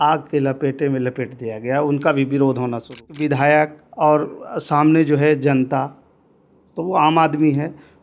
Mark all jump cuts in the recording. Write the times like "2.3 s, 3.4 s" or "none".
3.1 s